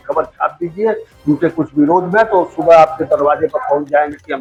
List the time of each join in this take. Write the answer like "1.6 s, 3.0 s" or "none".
none